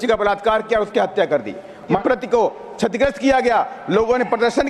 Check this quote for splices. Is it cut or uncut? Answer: cut